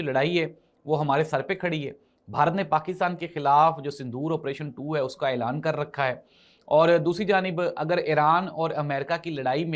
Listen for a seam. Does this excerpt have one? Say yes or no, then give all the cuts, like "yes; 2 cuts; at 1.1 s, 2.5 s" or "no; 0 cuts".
no; 0 cuts